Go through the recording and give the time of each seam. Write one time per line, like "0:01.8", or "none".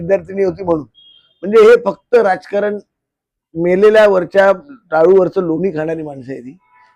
none